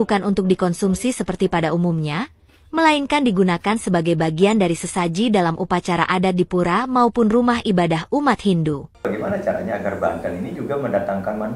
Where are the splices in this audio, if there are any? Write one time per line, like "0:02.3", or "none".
0:09.0